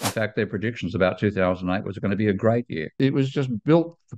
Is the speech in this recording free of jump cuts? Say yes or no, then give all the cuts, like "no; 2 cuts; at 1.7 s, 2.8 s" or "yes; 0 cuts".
no; 1 cut; at 3.0 s